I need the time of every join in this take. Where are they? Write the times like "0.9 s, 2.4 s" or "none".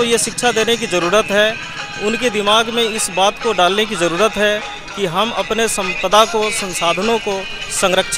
none